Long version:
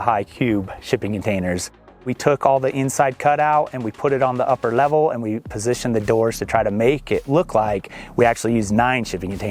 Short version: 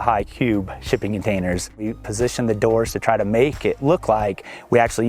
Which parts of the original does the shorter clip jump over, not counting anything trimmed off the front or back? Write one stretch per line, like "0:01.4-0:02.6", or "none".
0:01.9-0:05.3